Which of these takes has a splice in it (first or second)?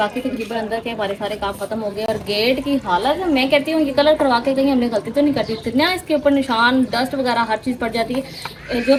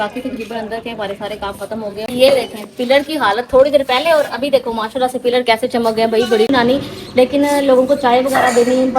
second